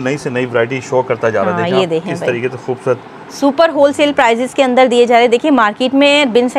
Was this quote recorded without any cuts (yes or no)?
yes